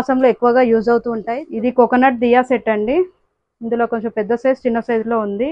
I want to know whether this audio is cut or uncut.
cut